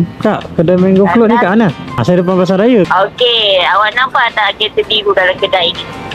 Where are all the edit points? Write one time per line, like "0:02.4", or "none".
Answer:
0:01.9
0:02.9